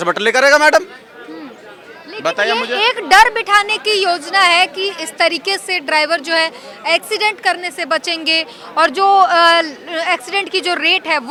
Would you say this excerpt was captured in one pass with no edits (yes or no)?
yes